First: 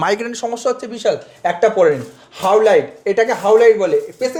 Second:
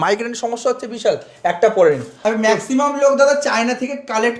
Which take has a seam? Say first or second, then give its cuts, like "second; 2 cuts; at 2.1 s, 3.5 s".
second; 1 cut; at 2.2 s